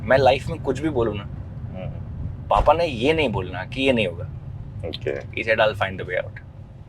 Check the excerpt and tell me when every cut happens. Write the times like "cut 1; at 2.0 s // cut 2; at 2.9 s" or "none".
none

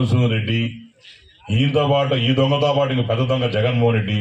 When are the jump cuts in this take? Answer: none

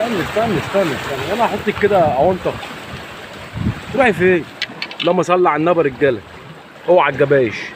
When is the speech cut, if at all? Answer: none

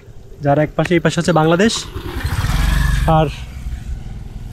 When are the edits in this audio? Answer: none

